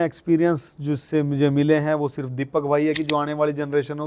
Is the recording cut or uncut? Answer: cut